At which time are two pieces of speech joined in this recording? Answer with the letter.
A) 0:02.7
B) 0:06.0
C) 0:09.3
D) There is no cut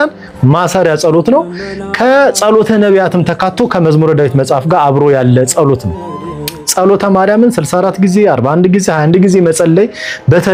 D